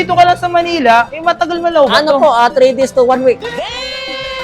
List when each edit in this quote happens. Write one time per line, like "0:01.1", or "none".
none